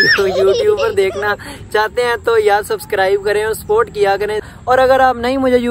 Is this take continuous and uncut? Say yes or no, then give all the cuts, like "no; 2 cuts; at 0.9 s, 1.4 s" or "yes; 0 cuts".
no; 1 cut; at 4.4 s